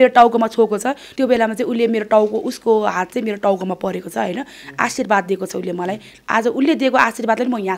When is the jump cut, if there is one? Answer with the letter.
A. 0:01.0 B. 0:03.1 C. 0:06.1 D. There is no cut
A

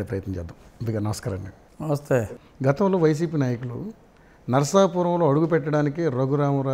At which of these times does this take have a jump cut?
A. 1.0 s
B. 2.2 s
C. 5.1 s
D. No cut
B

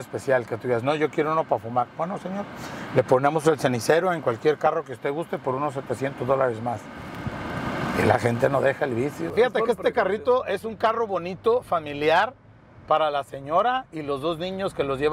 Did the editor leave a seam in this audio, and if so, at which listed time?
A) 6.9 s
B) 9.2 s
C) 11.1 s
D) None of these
B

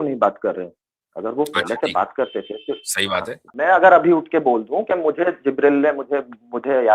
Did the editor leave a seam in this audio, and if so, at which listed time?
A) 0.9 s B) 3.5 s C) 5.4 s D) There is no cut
B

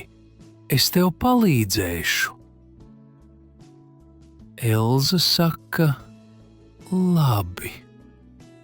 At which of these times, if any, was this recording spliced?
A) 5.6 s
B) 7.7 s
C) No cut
B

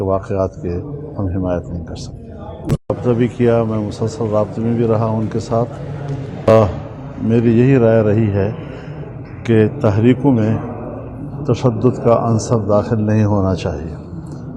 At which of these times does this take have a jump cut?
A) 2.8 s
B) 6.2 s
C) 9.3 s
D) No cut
A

